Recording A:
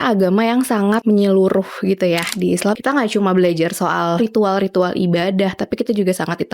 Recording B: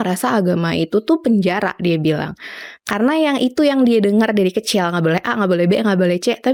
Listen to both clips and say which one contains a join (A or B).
A